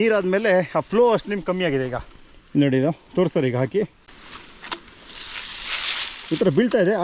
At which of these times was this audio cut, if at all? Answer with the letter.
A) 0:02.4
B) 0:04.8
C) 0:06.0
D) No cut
D